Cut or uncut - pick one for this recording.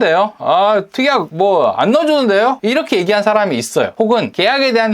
cut